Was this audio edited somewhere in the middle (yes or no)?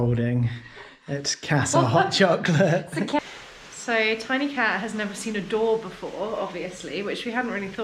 yes